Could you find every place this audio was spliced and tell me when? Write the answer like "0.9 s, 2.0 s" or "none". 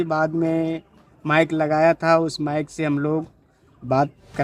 none